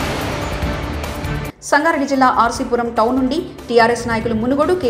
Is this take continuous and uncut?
yes; 0 cuts

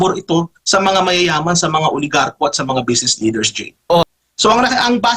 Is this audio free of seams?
no; 1 cut; at 4.0 s

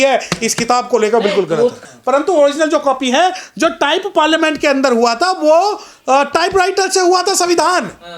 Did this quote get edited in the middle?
yes; 1 cut; at 1.9 s

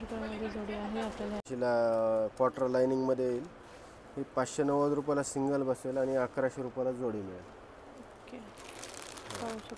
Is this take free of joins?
no; 1 cut; at 1.5 s

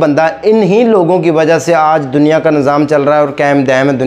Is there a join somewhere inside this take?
no; 0 cuts

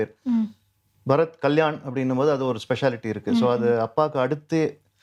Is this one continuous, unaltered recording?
yes; 0 cuts

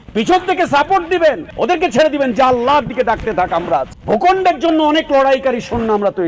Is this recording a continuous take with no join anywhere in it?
no; 2 cuts; at 1.5 s, 3.9 s

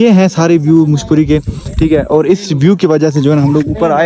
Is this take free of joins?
yes; 0 cuts

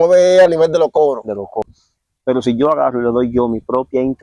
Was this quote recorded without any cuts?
no; 1 cut; at 1.7 s

